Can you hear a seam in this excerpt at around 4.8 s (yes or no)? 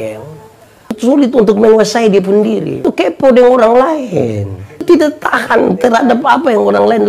yes